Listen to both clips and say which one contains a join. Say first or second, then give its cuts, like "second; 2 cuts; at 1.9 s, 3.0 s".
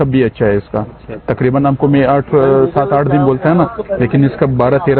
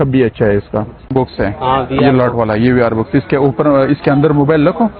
second; 1 cut; at 1.1 s